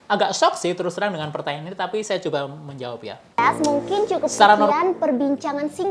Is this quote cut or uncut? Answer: cut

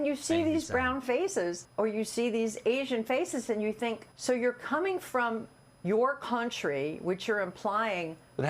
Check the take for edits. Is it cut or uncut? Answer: cut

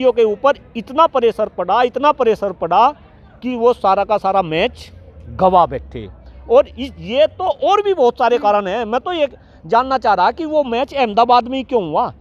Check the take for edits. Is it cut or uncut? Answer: uncut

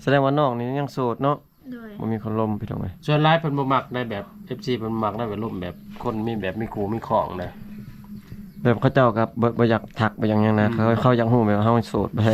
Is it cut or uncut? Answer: uncut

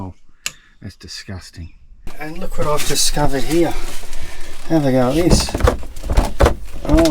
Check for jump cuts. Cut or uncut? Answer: cut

